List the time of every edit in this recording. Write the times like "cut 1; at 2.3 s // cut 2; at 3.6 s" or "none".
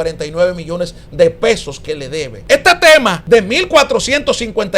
cut 1; at 2.3 s // cut 2; at 3.2 s